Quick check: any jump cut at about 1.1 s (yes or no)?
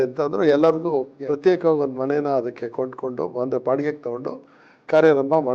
yes